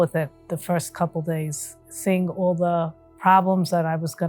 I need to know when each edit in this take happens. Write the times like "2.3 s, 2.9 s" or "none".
1.9 s, 3.0 s